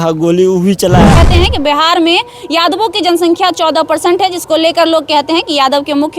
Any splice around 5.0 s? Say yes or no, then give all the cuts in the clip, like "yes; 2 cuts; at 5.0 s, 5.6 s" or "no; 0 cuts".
no; 1 cut; at 1.2 s